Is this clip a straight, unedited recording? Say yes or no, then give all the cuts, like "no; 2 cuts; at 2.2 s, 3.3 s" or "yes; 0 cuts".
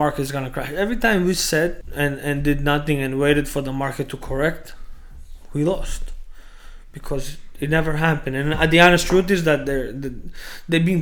no; 1 cut; at 1.8 s